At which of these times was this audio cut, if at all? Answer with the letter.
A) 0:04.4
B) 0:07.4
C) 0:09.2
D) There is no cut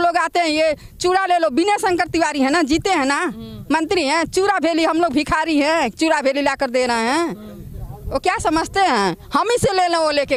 D